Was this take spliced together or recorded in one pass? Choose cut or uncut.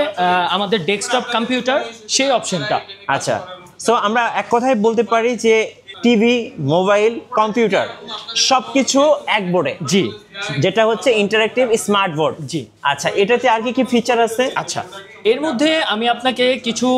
uncut